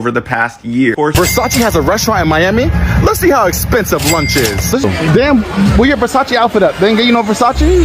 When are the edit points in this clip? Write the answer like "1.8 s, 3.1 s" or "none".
1.1 s, 4.8 s